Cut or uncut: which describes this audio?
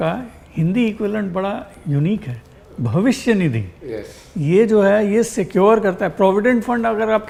uncut